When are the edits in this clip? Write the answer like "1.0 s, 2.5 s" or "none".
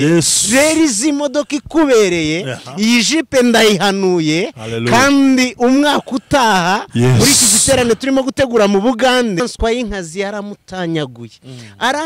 9.4 s